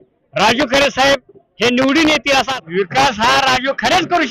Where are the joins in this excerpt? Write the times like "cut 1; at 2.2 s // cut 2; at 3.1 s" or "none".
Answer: cut 1; at 2.6 s